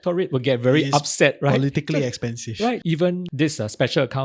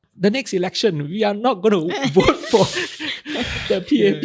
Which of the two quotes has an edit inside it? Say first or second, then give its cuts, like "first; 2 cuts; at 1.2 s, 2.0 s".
first; 1 cut; at 2.8 s